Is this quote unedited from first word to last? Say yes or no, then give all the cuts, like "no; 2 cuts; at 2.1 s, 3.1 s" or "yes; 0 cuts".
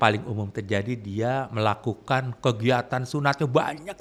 yes; 0 cuts